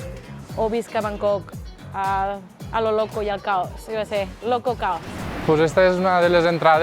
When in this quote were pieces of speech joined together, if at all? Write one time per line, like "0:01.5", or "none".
0:05.3